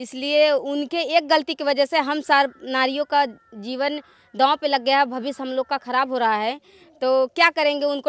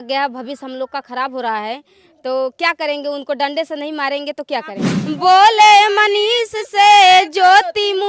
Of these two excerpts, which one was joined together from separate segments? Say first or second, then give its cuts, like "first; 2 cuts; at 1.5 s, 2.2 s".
second; 1 cut; at 4.9 s